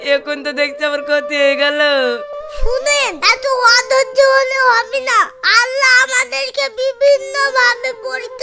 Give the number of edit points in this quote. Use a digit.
1